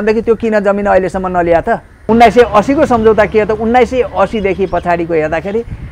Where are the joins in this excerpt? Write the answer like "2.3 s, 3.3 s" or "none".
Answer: 2.0 s